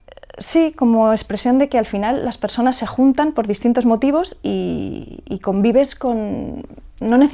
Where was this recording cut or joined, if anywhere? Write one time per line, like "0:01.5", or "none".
none